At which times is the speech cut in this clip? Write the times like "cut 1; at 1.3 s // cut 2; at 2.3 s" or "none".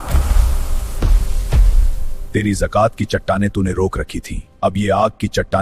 none